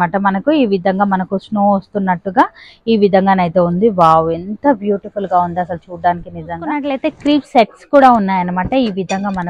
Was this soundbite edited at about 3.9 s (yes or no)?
no